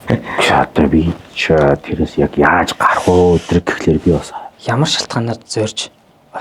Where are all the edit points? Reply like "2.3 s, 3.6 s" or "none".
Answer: 4.4 s